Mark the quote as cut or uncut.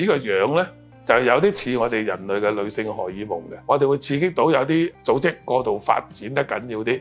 cut